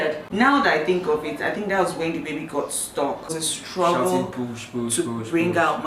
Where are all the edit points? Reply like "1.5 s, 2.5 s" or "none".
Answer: 3.3 s